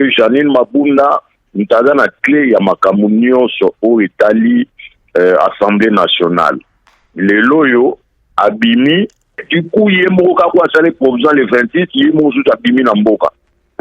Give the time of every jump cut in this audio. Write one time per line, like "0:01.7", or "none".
0:09.4